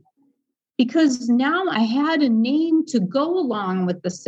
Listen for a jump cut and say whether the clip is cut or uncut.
cut